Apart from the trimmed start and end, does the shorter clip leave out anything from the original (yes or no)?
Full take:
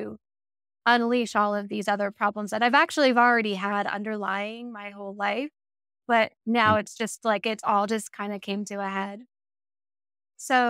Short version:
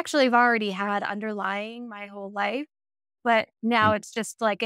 no